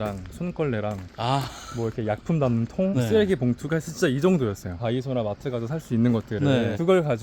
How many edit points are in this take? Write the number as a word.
one